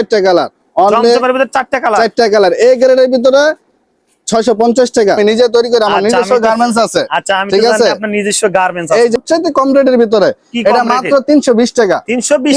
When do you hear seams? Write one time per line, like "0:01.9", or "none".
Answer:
0:05.2
0:09.2